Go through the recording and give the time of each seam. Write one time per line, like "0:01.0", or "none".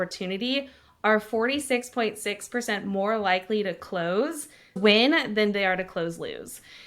0:04.8